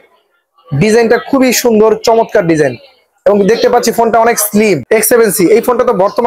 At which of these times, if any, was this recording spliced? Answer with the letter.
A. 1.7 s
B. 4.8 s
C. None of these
B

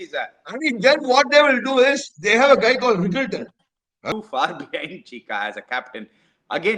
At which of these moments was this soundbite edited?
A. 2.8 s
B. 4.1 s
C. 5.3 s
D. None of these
B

